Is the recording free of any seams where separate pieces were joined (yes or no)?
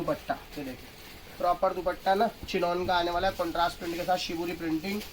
yes